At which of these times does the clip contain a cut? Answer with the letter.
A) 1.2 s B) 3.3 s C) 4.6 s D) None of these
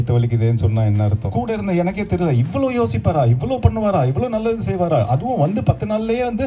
A